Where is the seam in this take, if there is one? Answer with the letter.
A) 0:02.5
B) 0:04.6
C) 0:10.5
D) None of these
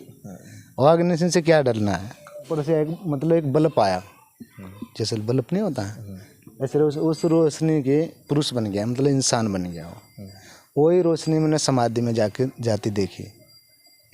A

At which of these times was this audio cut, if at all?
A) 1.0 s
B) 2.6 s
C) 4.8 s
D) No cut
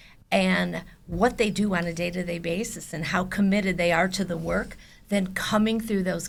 D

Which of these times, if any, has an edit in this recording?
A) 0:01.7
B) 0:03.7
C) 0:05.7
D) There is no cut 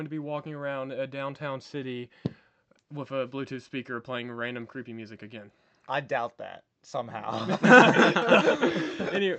D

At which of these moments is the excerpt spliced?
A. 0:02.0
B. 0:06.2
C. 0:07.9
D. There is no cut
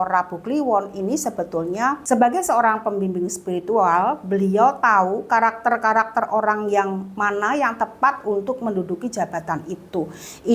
A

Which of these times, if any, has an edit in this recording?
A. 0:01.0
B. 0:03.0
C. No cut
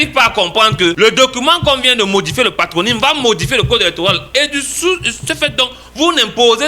A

